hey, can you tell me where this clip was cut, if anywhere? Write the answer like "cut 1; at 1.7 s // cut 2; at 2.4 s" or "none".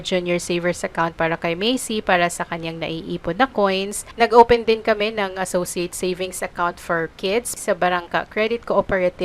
cut 1; at 4.0 s // cut 2; at 7.5 s